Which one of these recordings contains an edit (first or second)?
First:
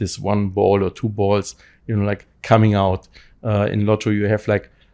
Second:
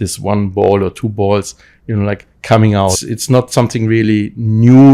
second